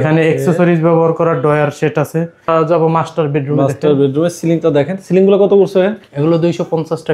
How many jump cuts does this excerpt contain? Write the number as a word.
one